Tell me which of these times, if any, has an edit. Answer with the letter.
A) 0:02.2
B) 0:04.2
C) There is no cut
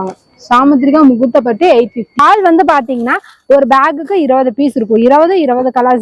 A